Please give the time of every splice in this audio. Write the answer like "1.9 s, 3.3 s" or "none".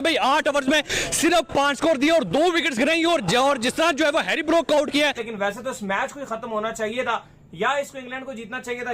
5.2 s